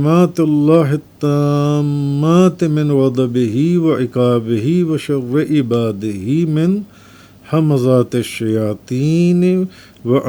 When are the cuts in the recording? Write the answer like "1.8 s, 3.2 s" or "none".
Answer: none